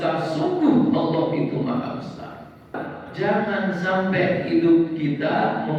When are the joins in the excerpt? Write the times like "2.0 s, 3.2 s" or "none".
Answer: 2.8 s

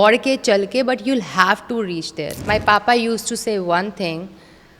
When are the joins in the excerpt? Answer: 2.4 s

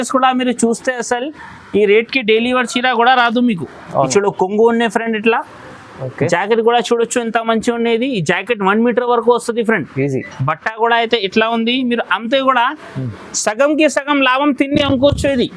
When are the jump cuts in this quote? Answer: 4.1 s

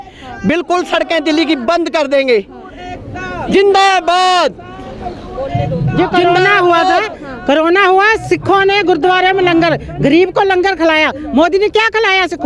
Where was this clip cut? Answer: none

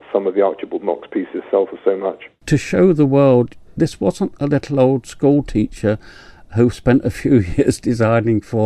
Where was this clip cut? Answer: 2.4 s

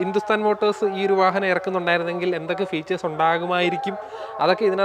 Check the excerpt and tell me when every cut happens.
none

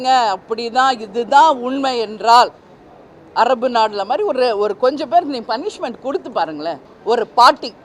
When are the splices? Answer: 6.9 s

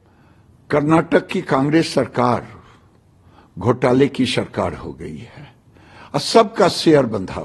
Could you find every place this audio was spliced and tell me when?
none

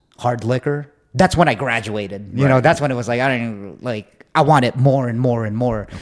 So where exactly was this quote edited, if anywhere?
none

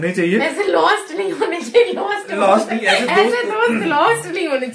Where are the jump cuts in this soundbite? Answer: none

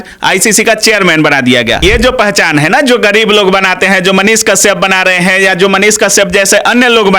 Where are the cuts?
1.8 s

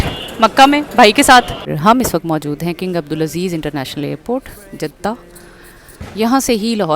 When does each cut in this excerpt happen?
1.6 s

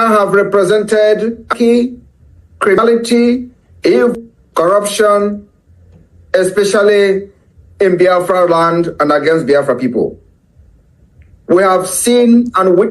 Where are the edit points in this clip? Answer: 1.5 s, 2.8 s, 4.2 s

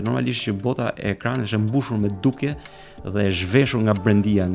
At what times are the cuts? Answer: none

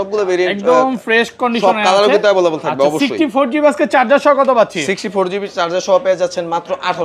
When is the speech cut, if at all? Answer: none

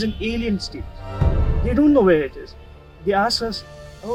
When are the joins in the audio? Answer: none

